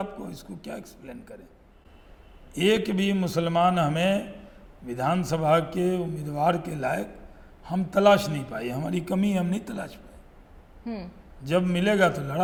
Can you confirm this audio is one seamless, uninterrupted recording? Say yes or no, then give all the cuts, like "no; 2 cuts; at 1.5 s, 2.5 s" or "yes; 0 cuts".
yes; 0 cuts